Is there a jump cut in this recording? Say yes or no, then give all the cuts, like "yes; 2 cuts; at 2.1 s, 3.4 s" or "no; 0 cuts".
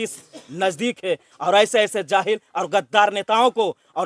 no; 0 cuts